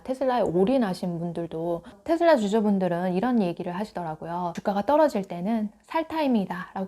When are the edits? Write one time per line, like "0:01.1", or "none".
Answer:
0:01.8